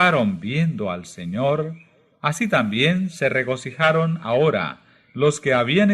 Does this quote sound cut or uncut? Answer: uncut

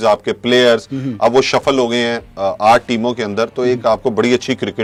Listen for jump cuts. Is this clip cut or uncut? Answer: uncut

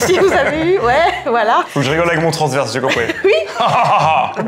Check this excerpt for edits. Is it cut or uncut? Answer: uncut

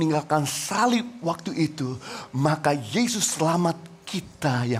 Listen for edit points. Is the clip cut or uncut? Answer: uncut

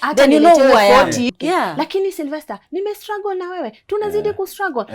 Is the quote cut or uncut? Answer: cut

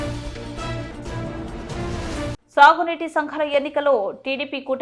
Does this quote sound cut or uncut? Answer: uncut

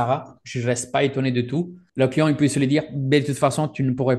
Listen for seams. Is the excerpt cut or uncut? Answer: cut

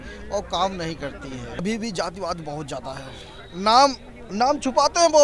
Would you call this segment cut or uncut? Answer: cut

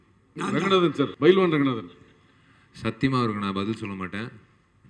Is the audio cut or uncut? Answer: cut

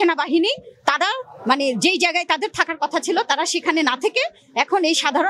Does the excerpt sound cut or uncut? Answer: uncut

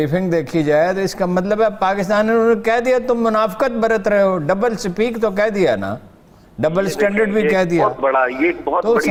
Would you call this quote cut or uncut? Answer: uncut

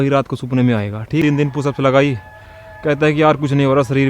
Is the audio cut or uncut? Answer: cut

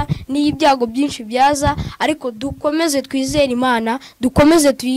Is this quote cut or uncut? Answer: uncut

